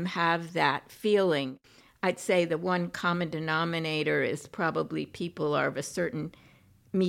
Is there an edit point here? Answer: yes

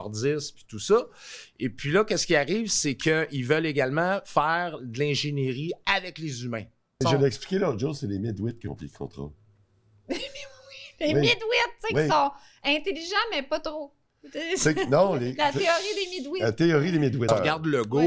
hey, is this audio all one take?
no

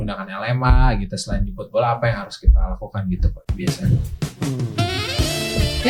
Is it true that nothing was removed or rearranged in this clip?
yes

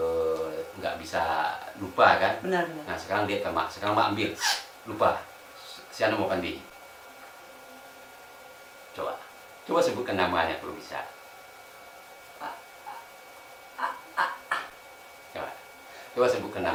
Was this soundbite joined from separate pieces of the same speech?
no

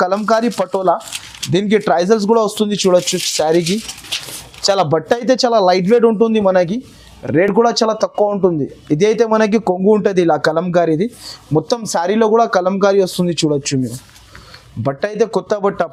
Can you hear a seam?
no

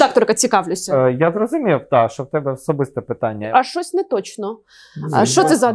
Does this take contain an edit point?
yes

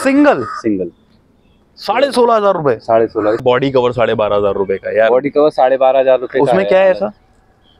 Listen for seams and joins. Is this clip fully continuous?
no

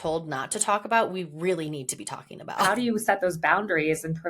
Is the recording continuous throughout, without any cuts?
no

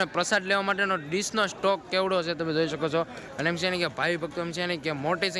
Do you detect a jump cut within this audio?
no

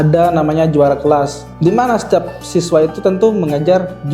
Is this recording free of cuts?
no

